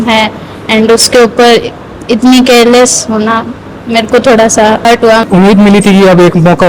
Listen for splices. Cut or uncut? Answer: cut